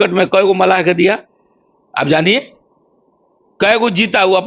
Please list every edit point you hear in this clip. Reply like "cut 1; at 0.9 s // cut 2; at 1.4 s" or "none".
none

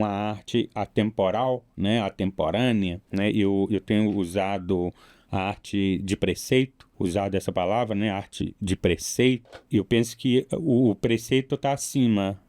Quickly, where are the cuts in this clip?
cut 1; at 3.0 s // cut 2; at 6.8 s // cut 3; at 9.5 s

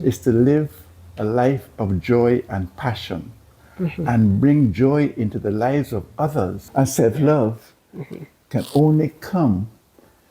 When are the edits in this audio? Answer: cut 1; at 6.6 s

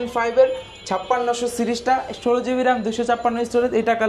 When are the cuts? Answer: none

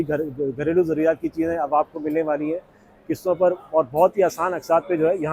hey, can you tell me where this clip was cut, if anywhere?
none

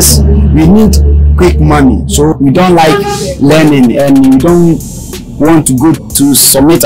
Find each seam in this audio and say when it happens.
cut 1; at 2.3 s // cut 2; at 6.1 s

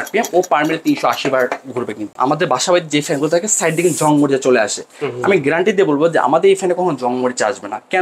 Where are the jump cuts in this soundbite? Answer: cut 1; at 2.1 s

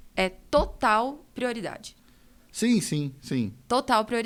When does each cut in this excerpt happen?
none

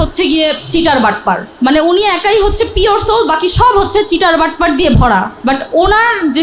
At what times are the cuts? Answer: cut 1; at 1.5 s // cut 2; at 5.3 s

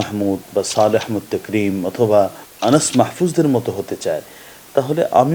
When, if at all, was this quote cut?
cut 1; at 2.4 s

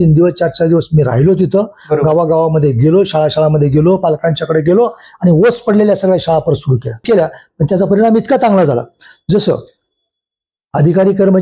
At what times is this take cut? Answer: cut 1; at 7.0 s

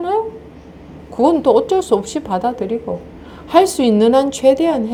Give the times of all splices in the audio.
none

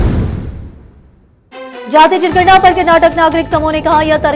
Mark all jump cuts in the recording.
cut 1; at 1.5 s

